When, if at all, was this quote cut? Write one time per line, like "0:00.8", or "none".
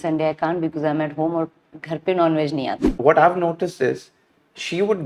0:02.9